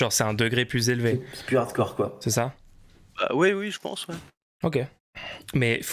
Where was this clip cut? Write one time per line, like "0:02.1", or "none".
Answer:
none